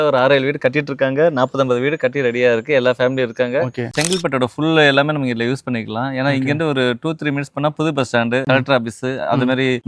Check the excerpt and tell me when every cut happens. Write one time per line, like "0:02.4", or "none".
0:03.9